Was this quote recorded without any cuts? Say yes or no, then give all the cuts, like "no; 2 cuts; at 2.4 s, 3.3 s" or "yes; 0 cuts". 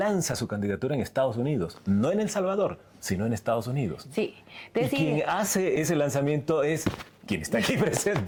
yes; 0 cuts